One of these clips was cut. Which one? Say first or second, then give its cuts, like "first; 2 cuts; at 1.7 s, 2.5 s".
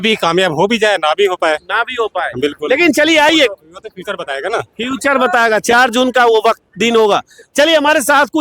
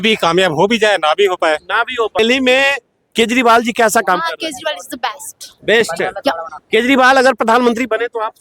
second; 1 cut; at 2.2 s